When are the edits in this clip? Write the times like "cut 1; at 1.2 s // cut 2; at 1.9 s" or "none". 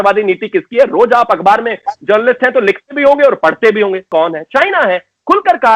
cut 1; at 4.0 s

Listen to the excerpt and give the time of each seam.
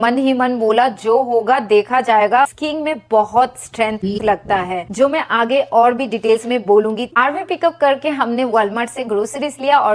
cut 1; at 2.6 s // cut 2; at 7.1 s

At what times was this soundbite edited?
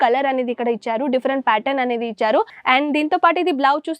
cut 1; at 2.6 s

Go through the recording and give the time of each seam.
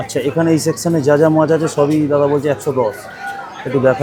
none

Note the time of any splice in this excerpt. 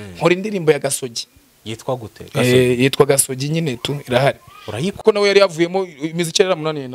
cut 1; at 5.0 s

